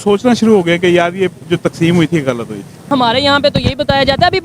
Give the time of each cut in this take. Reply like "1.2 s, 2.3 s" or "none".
2.9 s